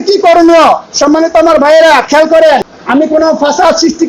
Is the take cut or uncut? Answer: cut